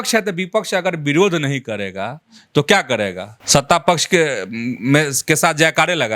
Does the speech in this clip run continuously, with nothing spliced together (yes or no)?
no